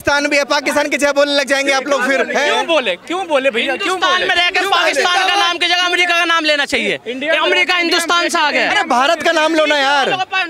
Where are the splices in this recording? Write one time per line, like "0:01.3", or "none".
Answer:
none